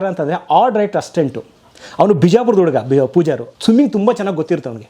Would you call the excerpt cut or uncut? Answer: cut